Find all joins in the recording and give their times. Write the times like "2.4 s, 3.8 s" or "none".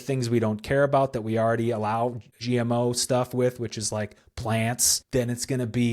2.4 s, 4.9 s